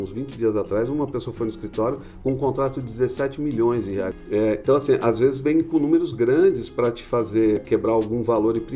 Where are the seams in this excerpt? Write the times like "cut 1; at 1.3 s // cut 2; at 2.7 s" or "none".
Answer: cut 1; at 4.2 s // cut 2; at 7.6 s